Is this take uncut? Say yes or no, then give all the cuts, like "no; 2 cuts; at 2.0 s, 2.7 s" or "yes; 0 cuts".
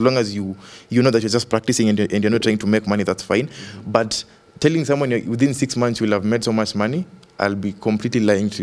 yes; 0 cuts